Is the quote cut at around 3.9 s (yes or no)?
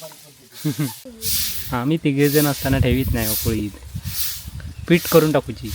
no